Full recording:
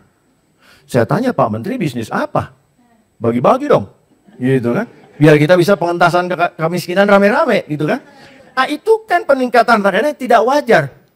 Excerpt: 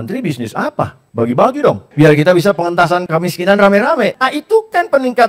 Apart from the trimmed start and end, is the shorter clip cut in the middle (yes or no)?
yes